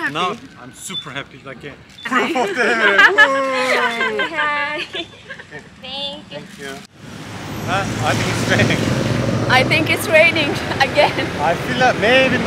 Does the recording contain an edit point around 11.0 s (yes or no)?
no